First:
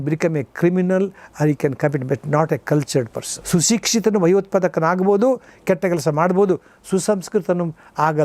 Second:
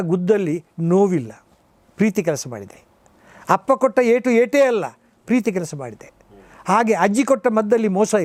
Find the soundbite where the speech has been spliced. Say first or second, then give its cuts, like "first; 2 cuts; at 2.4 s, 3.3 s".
first; 1 cut; at 3.3 s